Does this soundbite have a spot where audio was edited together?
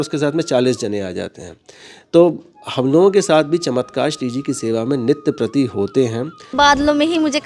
yes; 1 cut; at 6.5 s

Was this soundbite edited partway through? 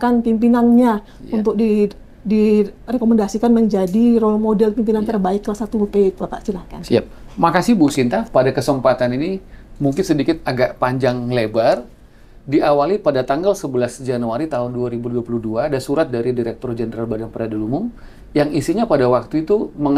no; 0 cuts

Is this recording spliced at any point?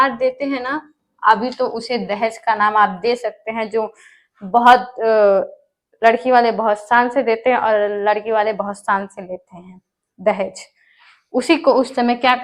no; 0 cuts

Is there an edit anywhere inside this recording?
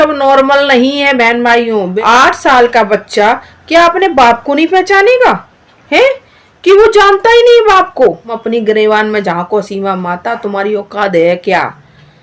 yes; 2 cuts; at 1.9 s, 8.3 s

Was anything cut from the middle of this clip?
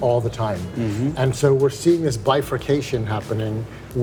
no; 0 cuts

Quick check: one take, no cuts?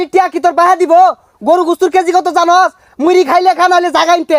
yes; 0 cuts

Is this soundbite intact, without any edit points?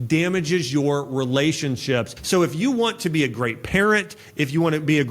no; 1 cut; at 2.2 s

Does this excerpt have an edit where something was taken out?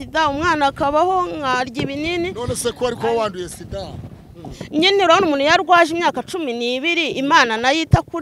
no; 0 cuts

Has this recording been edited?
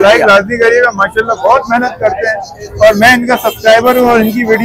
no; 0 cuts

